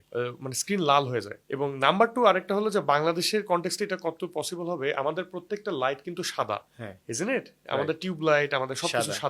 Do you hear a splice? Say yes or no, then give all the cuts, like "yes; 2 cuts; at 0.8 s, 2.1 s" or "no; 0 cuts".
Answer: no; 0 cuts